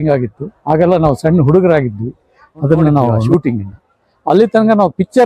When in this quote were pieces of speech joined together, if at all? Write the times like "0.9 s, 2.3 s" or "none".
3.2 s